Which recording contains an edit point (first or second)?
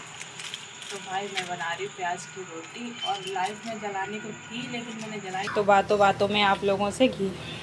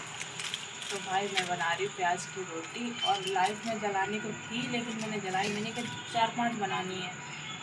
first